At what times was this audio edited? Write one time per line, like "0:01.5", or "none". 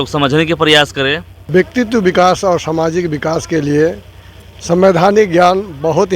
0:01.3